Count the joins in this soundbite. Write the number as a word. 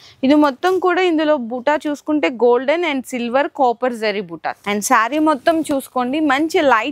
one